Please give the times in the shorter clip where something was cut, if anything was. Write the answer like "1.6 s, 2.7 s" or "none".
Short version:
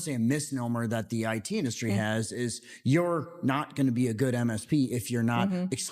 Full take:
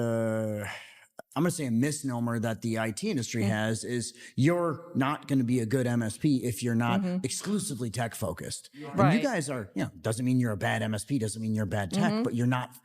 none